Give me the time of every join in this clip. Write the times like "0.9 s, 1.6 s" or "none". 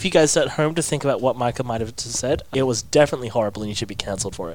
2.5 s